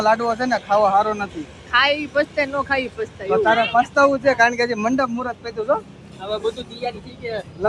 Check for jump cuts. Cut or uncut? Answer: uncut